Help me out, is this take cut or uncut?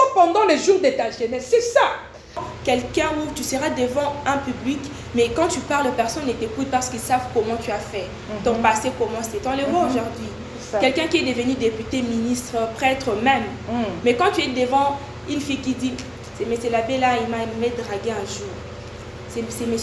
cut